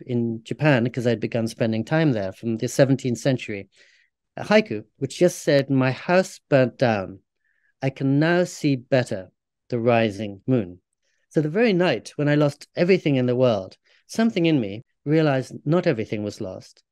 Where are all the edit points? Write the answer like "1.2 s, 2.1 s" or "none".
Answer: 14.8 s